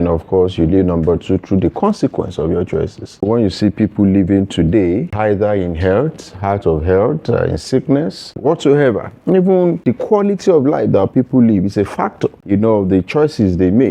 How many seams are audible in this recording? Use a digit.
5